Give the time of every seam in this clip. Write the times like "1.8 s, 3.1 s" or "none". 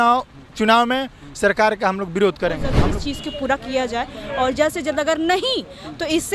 2.7 s